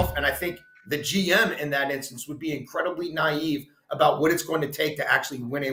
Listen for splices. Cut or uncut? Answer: uncut